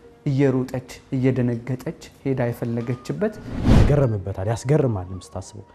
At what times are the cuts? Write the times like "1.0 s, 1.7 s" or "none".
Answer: 3.5 s